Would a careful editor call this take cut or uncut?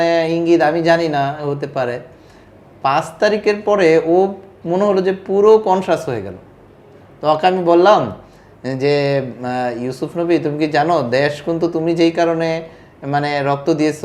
uncut